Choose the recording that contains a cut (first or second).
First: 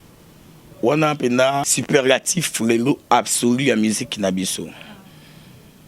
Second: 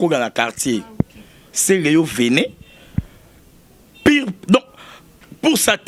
first